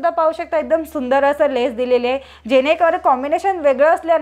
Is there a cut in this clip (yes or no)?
no